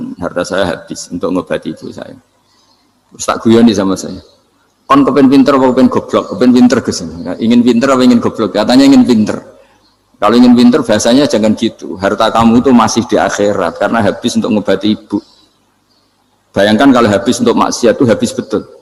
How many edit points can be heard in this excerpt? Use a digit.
0